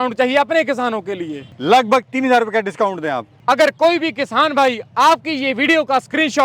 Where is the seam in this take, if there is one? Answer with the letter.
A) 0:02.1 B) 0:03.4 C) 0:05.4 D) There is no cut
D